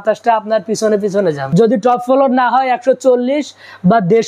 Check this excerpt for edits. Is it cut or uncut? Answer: cut